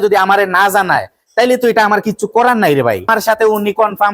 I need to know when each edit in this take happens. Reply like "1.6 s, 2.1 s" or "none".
3.1 s